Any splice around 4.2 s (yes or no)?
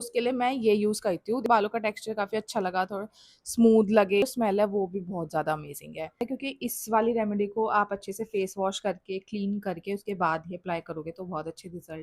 yes